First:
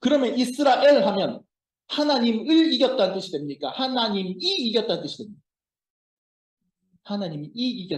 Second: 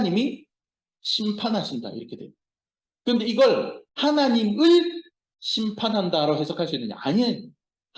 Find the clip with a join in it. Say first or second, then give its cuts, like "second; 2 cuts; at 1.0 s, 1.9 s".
second; 1 cut; at 3.8 s